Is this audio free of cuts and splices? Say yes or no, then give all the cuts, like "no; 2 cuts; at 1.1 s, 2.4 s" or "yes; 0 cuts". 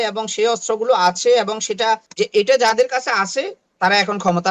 no; 1 cut; at 2.1 s